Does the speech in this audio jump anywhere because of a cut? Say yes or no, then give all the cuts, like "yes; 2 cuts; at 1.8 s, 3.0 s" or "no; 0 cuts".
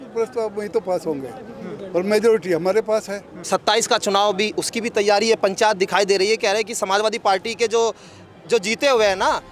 yes; 1 cut; at 3.4 s